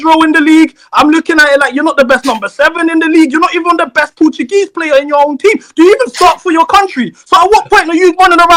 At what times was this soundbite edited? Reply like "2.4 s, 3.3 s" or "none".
none